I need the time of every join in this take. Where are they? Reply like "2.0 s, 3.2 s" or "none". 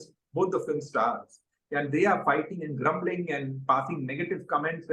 none